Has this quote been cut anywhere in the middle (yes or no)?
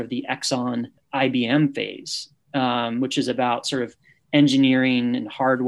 yes